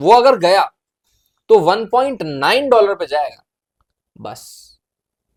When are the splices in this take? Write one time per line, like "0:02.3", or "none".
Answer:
none